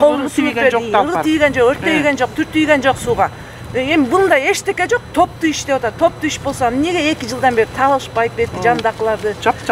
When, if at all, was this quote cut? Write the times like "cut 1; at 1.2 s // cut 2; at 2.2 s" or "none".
none